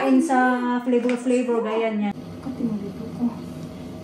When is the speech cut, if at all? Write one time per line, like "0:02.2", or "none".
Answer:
0:02.1